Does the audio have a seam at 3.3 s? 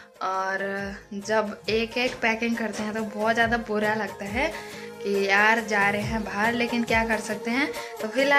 no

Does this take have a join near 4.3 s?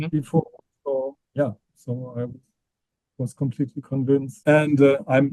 yes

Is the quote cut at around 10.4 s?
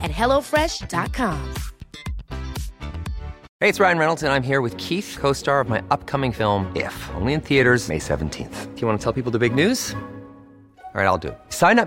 no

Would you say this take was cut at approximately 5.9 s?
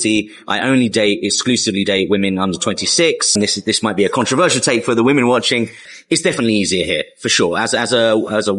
yes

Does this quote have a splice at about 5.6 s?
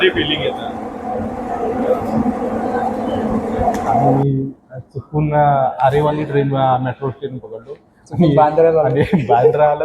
no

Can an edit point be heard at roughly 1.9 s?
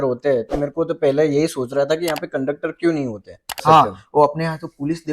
no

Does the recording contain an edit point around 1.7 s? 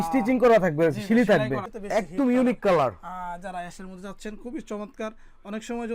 yes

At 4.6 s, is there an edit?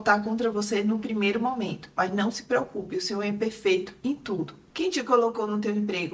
yes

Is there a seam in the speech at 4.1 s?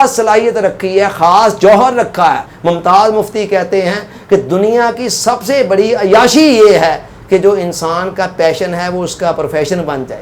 no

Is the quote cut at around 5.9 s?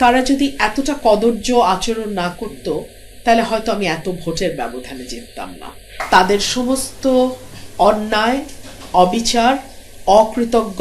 yes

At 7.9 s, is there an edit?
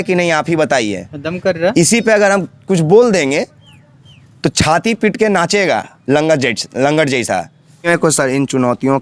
yes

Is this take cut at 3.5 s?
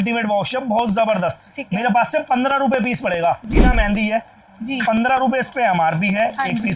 yes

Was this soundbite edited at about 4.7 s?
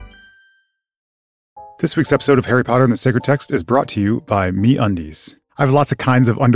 no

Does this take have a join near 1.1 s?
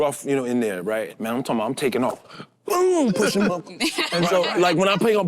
yes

